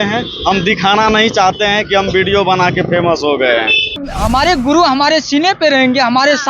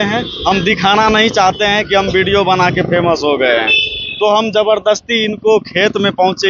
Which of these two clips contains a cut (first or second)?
first